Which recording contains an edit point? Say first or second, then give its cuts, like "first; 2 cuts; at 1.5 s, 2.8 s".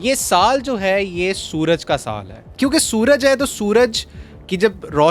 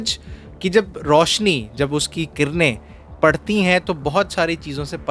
first; 1 cut; at 2.5 s